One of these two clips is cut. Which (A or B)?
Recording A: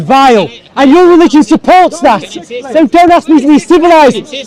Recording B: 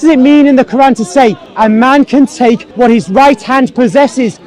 B